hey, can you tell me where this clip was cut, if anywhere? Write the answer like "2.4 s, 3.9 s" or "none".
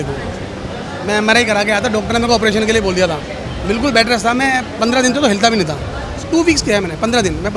6.2 s